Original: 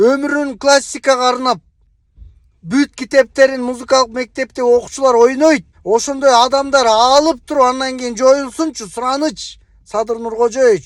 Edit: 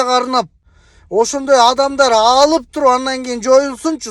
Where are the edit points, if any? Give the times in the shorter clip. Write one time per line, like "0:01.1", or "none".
0:01.0